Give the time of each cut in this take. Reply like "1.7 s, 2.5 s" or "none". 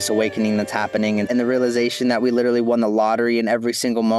1.3 s